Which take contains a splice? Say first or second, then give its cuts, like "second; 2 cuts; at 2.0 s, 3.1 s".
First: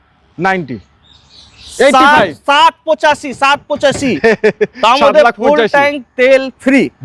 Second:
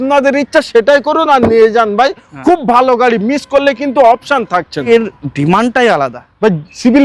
second; 1 cut; at 4.9 s